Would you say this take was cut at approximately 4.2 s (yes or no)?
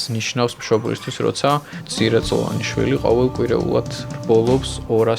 no